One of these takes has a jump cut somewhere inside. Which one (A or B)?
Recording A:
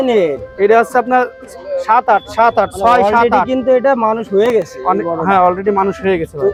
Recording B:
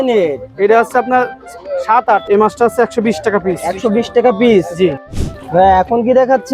B